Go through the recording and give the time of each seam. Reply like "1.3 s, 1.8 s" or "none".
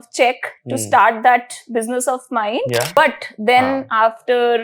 3.0 s

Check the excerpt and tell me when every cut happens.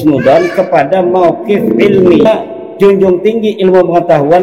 2.3 s

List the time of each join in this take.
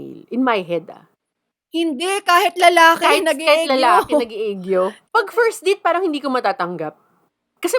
5.0 s

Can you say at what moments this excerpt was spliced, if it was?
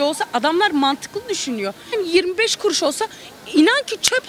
1.9 s

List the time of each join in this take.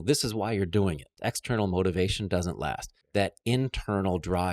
1.1 s, 2.9 s

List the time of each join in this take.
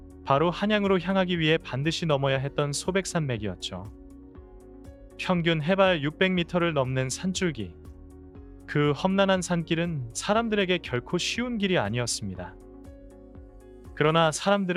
none

